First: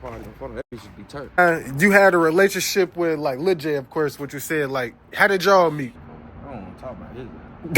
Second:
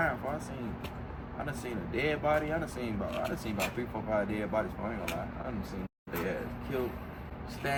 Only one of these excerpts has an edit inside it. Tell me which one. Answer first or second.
first